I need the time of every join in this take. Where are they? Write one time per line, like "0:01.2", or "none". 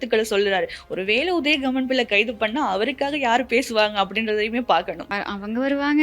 0:05.1